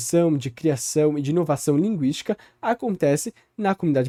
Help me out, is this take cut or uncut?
uncut